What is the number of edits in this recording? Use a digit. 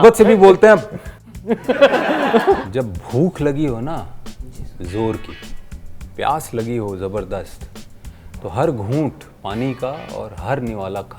1